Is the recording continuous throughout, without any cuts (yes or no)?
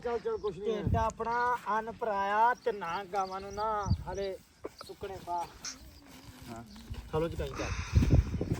no